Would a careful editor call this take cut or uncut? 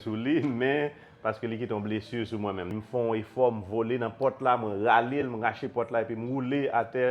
cut